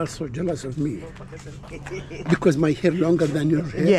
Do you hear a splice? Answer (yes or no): no